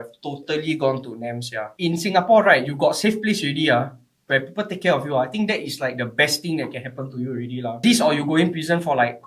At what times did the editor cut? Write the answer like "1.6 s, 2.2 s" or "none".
1.6 s, 7.8 s